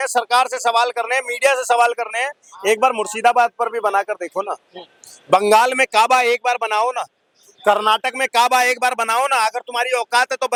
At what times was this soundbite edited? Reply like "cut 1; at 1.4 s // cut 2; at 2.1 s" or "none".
none

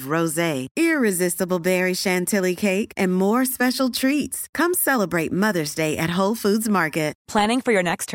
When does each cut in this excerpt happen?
cut 1; at 7.2 s

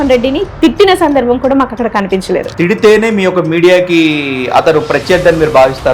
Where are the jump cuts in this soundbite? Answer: cut 1; at 2.5 s

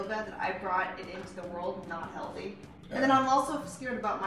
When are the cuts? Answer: cut 1; at 2.7 s

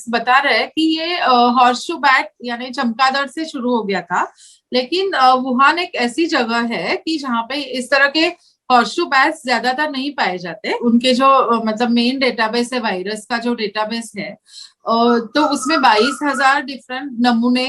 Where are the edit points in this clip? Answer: cut 1; at 10.7 s

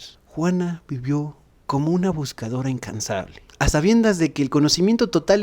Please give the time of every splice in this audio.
cut 1; at 3.4 s

